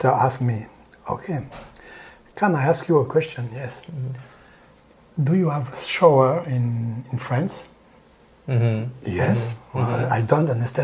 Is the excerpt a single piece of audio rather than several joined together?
yes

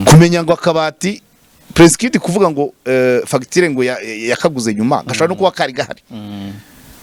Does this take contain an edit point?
no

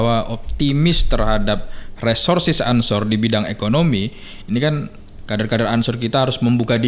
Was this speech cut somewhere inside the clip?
no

